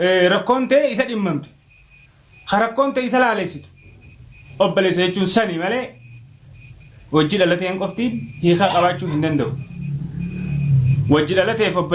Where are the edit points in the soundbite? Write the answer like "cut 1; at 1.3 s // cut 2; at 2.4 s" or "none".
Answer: none